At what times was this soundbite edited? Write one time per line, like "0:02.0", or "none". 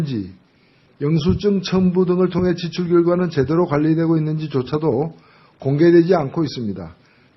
0:03.7